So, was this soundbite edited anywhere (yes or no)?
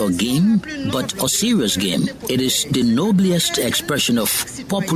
no